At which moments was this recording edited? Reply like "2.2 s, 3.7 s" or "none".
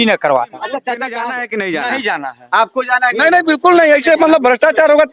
1.1 s